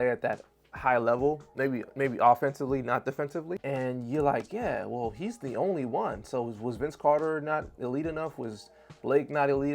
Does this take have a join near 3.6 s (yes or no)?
yes